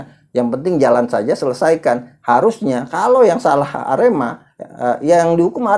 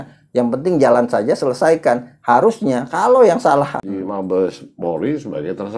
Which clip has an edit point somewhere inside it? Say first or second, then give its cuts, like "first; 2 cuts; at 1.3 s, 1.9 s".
second; 1 cut; at 3.8 s